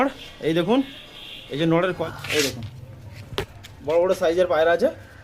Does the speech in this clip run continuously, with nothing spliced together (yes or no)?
no